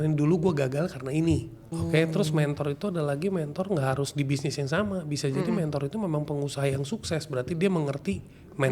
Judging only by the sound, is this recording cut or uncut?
cut